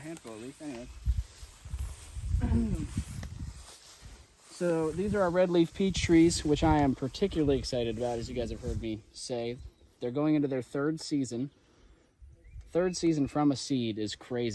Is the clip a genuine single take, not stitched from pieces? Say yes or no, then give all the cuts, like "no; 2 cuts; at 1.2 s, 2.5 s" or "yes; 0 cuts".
yes; 0 cuts